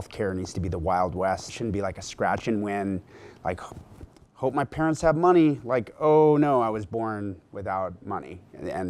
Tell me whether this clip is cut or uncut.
cut